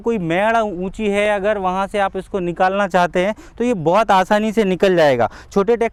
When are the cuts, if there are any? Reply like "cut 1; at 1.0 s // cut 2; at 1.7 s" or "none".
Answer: none